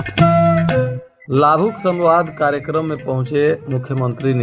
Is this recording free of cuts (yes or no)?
no